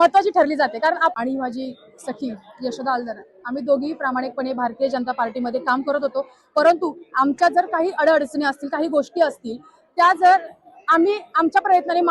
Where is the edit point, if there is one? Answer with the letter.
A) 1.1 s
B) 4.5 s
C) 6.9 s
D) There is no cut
A